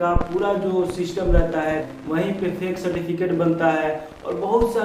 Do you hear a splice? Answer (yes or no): yes